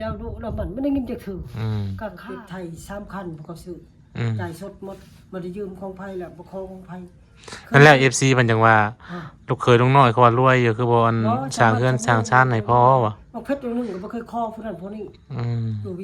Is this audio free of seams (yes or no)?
no